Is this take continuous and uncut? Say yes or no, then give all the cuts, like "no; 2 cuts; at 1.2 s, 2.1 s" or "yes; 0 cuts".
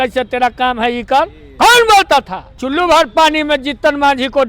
no; 1 cut; at 2.6 s